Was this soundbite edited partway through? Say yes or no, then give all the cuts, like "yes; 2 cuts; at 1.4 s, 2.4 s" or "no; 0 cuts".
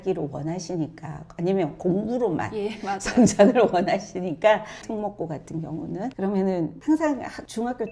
yes; 1 cut; at 4.8 s